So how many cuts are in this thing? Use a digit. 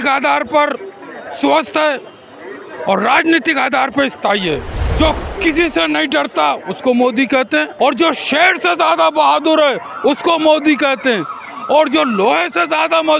2